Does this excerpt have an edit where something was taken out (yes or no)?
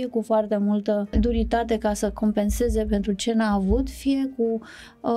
yes